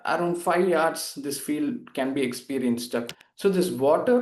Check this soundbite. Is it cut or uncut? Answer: cut